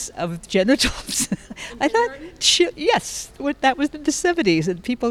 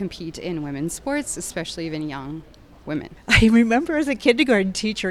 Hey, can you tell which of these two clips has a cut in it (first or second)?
second